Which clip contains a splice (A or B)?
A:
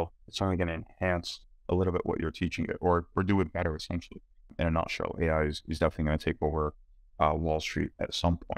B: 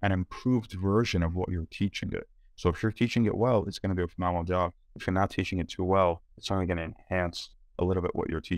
A